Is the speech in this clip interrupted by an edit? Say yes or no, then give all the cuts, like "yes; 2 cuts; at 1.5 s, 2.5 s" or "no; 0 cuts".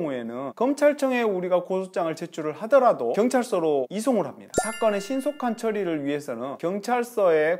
yes; 1 cut; at 4.4 s